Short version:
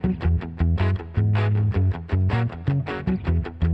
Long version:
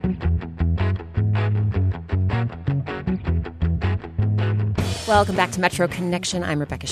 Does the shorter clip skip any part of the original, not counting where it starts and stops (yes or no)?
no